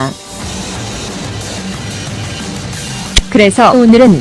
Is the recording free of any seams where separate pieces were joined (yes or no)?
no